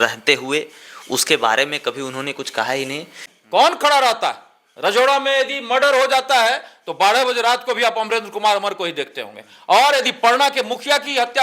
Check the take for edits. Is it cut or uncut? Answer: cut